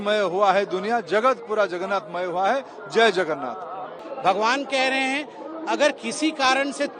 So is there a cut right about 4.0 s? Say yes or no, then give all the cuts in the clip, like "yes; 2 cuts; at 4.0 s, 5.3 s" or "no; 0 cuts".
yes; 1 cut; at 4.0 s